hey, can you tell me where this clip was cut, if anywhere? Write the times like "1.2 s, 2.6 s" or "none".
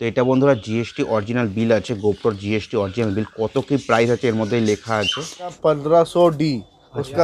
5.6 s